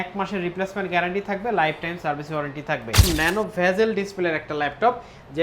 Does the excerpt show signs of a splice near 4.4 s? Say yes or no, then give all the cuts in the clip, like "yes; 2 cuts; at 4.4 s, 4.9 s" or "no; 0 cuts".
no; 1 cut; at 3.0 s